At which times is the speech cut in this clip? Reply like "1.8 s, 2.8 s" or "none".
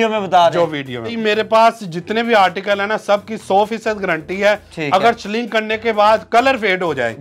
1.2 s